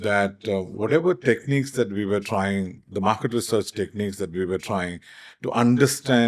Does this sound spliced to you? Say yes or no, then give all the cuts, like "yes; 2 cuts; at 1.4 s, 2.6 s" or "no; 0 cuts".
no; 0 cuts